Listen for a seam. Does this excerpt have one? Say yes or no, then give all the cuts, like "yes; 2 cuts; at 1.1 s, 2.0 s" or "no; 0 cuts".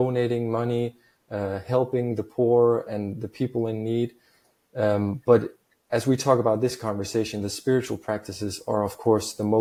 no; 0 cuts